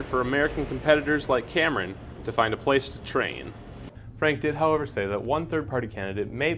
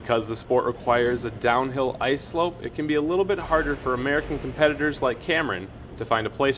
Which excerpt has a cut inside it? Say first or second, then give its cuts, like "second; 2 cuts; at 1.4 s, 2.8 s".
first; 1 cut; at 3.8 s